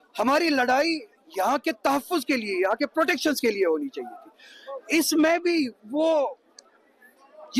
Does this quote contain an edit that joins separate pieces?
no; 0 cuts

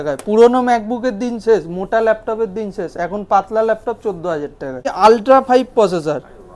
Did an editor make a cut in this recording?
yes; 1 cut; at 4.8 s

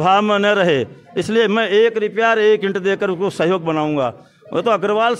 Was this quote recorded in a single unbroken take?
yes; 0 cuts

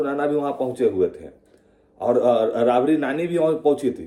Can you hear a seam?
no; 0 cuts

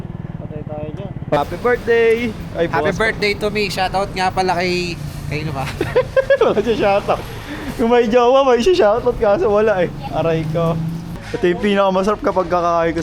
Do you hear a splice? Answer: yes; 2 cuts; at 1.4 s, 11.1 s

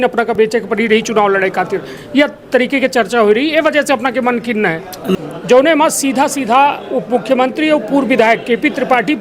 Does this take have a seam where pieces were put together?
yes; 1 cut; at 5.1 s

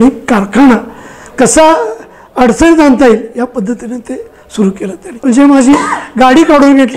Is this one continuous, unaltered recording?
no; 1 cut; at 5.2 s

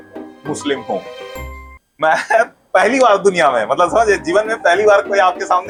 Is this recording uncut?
yes; 0 cuts

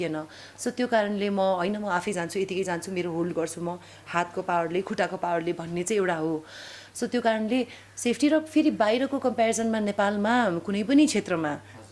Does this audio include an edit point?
no; 0 cuts

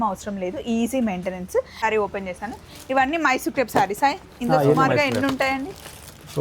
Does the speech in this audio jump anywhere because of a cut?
yes; 1 cut; at 1.8 s

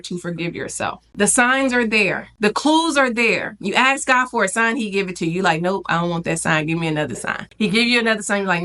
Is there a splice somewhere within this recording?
yes; 3 cuts; at 1.0 s, 2.3 s, 7.4 s

